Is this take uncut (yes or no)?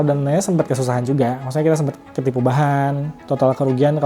no